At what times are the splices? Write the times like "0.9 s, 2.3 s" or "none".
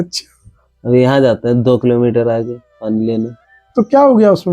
none